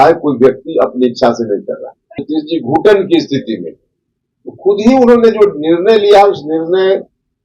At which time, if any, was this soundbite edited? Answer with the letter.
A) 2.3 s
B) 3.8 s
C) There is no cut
A